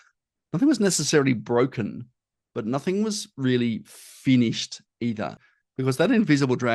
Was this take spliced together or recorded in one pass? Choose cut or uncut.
cut